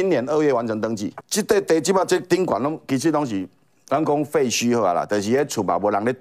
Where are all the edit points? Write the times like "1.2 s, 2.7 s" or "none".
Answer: 1.2 s